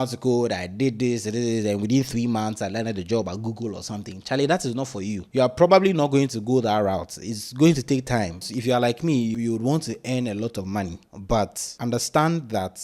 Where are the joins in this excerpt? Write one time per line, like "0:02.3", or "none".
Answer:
0:08.4
0:09.3
0:11.6